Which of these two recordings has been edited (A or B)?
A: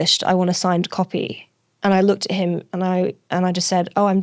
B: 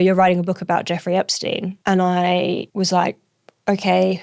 B